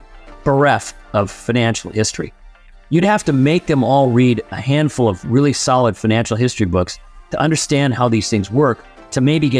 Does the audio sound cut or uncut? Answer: uncut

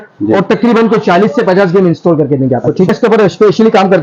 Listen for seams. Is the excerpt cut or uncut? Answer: cut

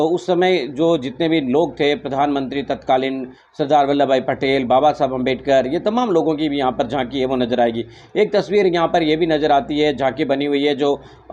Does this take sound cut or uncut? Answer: uncut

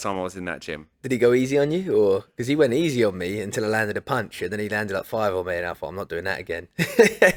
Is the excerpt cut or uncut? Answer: uncut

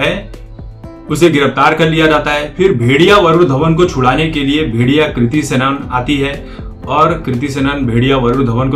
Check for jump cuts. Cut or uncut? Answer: uncut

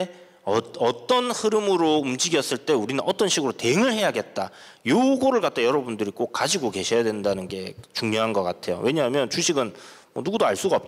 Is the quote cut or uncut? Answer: uncut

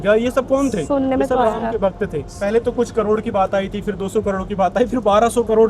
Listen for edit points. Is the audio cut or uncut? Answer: uncut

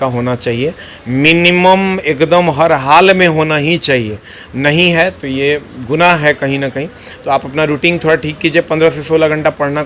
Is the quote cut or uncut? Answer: uncut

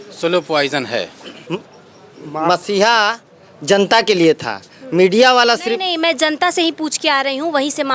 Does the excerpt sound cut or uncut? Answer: cut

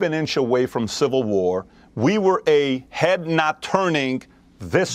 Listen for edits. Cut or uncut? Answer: uncut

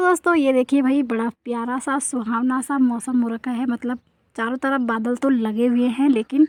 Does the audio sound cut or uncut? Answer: uncut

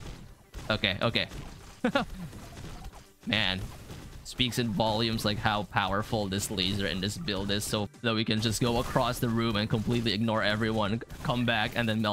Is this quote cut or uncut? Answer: cut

